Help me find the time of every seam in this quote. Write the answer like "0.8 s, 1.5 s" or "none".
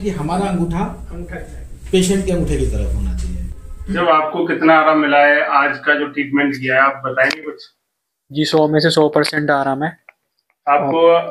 3.9 s